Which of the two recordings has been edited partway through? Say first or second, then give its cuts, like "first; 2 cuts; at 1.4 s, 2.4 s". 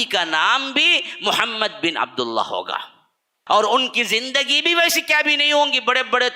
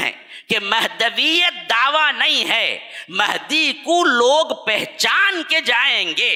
first; 1 cut; at 3.4 s